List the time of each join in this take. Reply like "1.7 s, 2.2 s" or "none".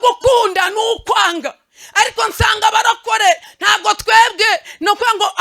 3.5 s